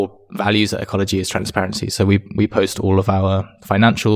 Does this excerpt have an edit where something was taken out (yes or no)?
no